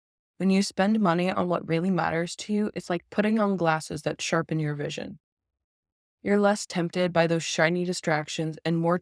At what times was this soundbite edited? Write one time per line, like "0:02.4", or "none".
none